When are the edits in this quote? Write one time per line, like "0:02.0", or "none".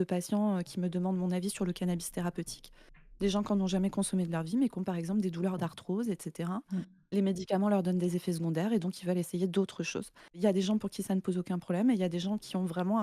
none